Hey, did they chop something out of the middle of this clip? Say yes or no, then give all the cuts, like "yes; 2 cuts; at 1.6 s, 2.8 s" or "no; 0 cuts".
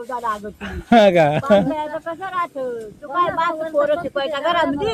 no; 0 cuts